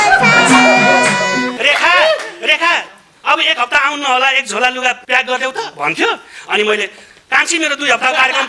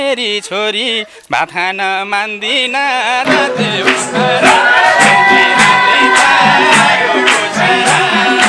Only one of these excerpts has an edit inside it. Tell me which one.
first; 2 cuts; at 1.4 s, 5.0 s

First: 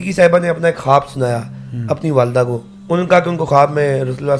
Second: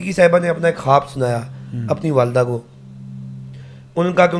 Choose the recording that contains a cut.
first; 1 cut; at 2.7 s

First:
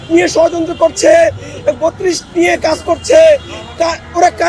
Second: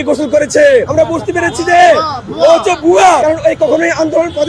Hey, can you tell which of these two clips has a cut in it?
second; 2 cuts; at 0.9 s, 3.2 s

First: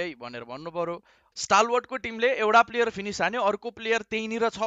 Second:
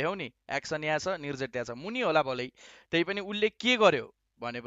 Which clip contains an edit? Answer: first; 1 cut; at 1.2 s

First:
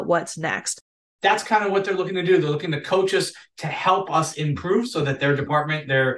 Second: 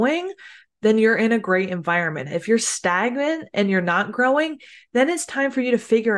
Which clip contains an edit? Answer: first; 1 cut; at 1.0 s

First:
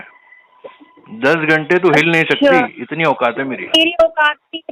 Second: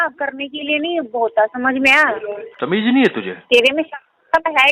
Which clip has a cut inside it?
second; 1 cut; at 2.5 s

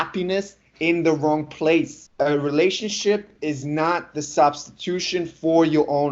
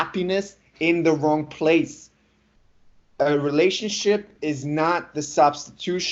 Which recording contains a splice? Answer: first; 1 cut; at 2.0 s

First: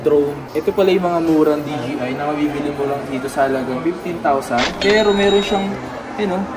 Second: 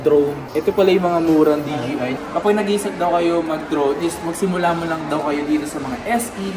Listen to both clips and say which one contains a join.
second; 1 cut; at 2.2 s

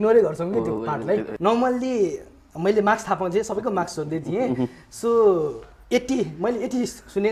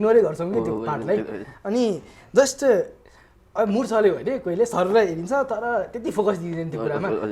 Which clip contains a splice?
first; 1 cut; at 1.3 s

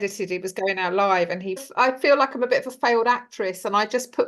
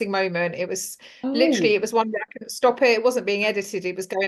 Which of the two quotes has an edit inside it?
first; 1 cut; at 1.7 s

